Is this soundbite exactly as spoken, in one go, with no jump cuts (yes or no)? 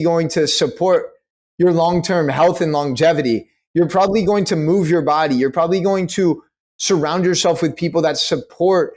yes